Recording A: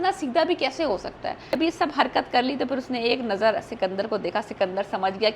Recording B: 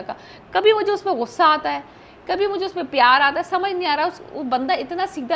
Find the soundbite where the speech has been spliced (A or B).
A